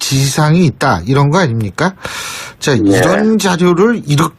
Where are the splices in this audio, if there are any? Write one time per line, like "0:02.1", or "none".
0:02.3